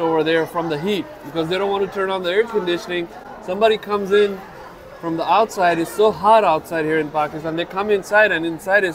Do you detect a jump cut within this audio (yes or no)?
no